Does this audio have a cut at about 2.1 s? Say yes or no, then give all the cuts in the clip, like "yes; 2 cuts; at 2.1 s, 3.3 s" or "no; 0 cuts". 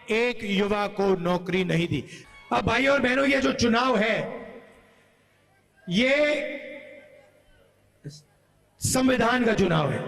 yes; 1 cut; at 2.1 s